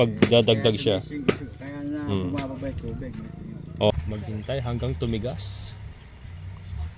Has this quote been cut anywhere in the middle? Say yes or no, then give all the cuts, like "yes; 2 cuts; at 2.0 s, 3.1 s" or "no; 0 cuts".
yes; 1 cut; at 3.9 s